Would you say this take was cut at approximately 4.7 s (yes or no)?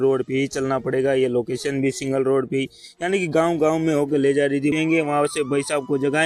yes